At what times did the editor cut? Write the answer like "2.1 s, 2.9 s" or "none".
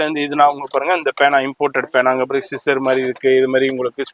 none